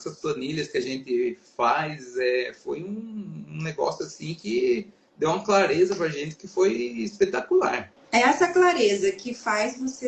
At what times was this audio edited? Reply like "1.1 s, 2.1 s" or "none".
8.0 s